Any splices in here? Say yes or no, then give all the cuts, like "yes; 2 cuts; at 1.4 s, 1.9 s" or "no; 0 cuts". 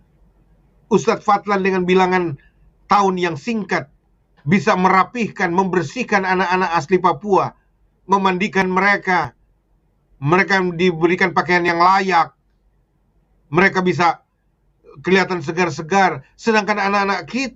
no; 0 cuts